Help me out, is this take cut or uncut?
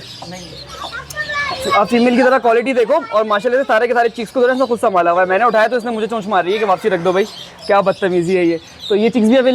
uncut